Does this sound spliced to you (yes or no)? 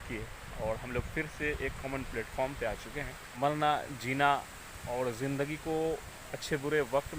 yes